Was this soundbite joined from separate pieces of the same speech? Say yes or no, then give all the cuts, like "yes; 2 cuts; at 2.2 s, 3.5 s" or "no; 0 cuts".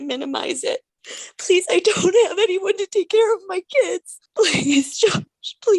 yes; 2 cuts; at 1.0 s, 4.1 s